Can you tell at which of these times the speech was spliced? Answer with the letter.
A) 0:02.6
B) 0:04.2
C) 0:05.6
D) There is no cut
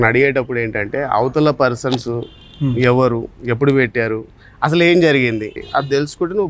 C